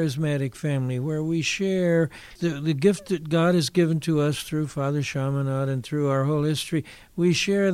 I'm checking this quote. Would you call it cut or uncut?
cut